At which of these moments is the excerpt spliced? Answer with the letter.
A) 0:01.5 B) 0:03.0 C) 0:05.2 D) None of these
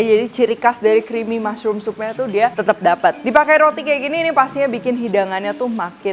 B